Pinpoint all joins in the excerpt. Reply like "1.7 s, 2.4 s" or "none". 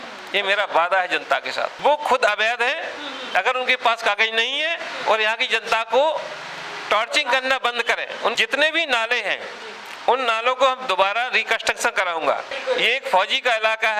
1.7 s, 8.4 s, 12.5 s